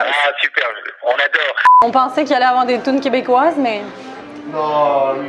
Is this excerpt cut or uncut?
cut